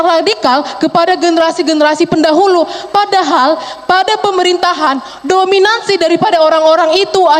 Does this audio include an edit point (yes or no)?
no